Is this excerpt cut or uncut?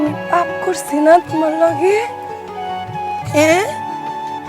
uncut